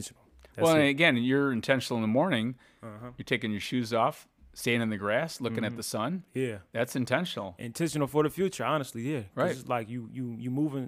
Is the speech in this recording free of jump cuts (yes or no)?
yes